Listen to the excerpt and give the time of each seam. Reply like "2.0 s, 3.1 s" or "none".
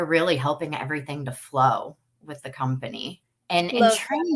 3.3 s